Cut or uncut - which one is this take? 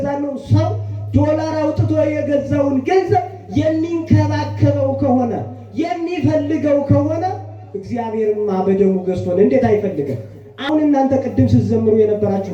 cut